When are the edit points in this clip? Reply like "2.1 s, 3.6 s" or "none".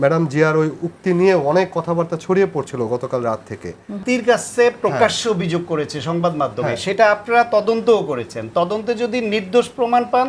4.0 s